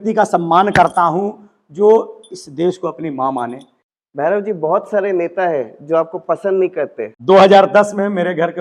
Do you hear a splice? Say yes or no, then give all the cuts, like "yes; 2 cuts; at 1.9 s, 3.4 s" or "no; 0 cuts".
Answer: yes; 2 cuts; at 3.9 s, 7.1 s